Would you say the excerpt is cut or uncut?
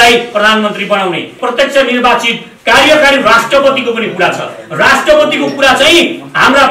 cut